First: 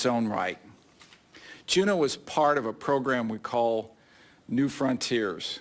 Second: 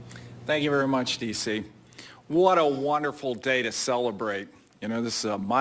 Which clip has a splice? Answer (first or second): second